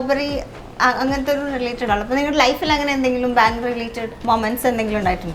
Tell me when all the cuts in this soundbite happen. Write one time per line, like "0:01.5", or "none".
0:04.0